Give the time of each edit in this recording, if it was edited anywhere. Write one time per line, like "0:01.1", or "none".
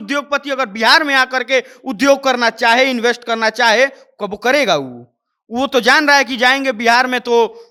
none